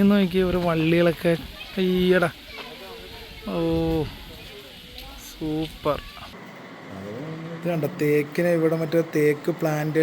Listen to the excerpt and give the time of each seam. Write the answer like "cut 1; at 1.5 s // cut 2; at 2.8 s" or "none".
cut 1; at 6.4 s